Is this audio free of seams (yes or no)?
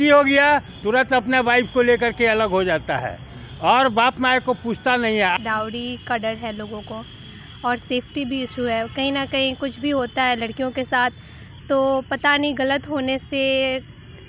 no